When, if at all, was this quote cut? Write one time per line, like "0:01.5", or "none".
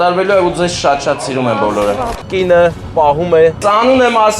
0:02.1
0:03.6